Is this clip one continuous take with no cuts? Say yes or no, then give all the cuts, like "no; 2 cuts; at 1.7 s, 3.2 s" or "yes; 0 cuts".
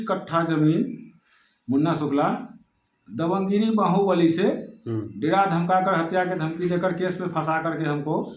yes; 0 cuts